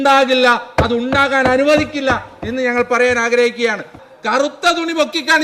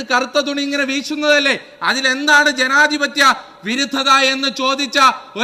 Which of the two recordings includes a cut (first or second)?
first